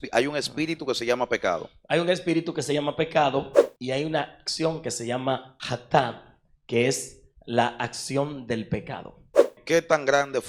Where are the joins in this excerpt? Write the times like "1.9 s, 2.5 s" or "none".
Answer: 5.5 s, 9.6 s